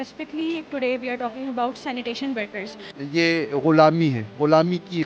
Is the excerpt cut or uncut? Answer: cut